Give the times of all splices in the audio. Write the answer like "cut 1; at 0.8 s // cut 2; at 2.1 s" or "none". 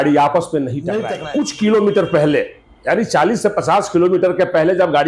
cut 1; at 1.1 s